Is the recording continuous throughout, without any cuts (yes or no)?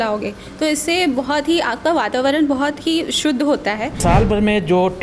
no